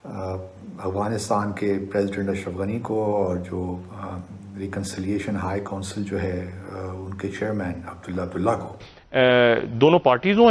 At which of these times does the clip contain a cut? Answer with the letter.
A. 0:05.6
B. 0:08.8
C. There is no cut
B